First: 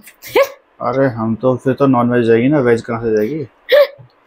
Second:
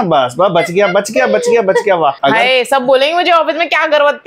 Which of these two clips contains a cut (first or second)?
second